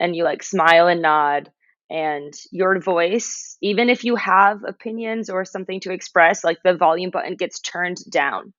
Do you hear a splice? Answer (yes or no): no